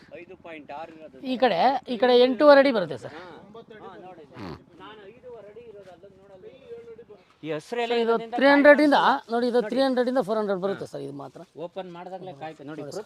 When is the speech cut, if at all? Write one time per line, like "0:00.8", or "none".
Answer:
0:07.3